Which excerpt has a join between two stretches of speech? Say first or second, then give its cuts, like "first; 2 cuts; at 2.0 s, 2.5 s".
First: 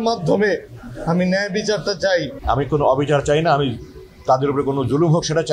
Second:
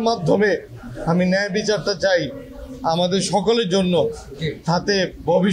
first; 1 cut; at 2.3 s